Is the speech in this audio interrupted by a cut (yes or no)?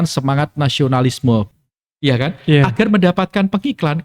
yes